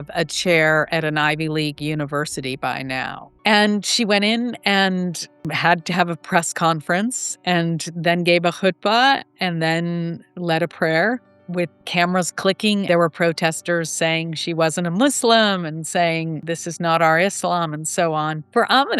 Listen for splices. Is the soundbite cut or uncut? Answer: cut